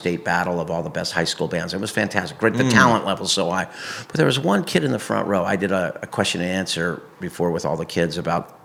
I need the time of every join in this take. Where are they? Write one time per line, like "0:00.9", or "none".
none